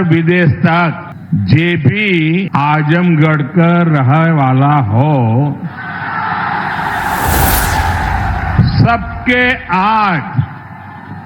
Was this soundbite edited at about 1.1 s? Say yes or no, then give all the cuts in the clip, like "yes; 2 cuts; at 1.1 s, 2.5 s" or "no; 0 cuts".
yes; 2 cuts; at 1.1 s, 2.5 s